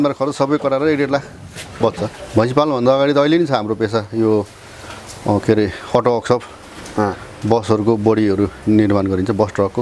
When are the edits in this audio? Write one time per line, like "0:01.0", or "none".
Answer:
0:02.2